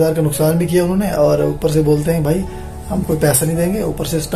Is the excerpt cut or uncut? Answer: uncut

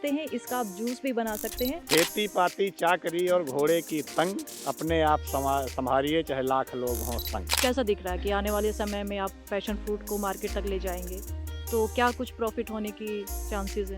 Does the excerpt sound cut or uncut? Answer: cut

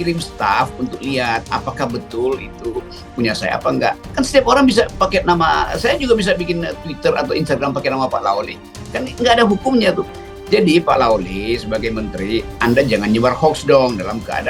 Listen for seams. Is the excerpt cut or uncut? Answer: uncut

